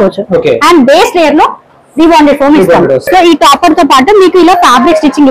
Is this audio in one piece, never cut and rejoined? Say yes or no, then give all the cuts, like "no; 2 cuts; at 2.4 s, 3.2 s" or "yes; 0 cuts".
no; 1 cut; at 3.1 s